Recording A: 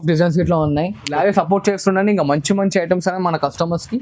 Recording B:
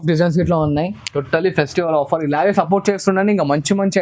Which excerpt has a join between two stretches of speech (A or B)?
A